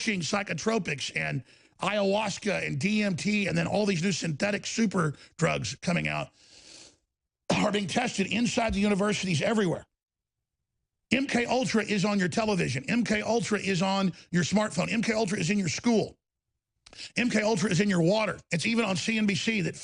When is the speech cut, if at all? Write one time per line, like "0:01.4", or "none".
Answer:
0:18.4